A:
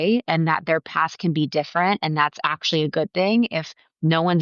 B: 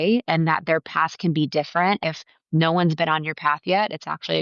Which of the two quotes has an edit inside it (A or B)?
B